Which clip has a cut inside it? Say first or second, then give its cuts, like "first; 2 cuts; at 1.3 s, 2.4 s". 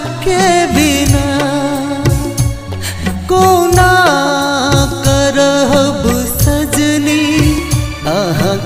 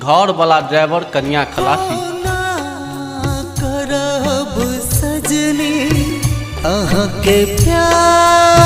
second; 1 cut; at 1.9 s